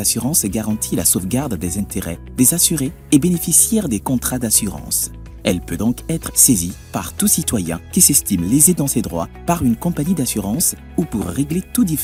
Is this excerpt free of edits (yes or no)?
yes